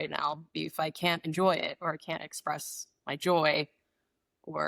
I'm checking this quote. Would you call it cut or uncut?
uncut